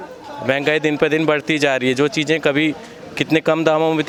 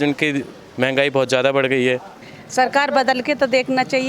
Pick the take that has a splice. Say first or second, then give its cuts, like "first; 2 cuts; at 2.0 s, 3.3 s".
second; 1 cut; at 2.2 s